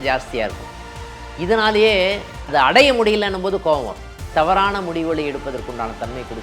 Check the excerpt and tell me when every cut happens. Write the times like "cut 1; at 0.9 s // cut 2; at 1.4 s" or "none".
cut 1; at 4.3 s